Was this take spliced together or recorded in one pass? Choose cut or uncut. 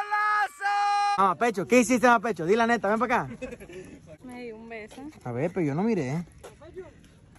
cut